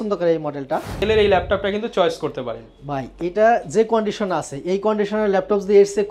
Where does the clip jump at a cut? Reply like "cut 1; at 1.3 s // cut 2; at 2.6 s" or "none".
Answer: cut 1; at 1.0 s